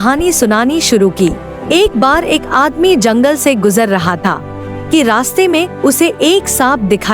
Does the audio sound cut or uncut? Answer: cut